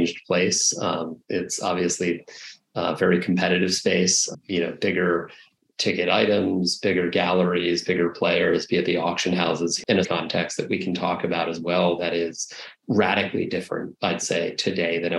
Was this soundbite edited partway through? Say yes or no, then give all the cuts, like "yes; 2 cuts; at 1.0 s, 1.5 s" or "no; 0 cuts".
yes; 1 cut; at 9.9 s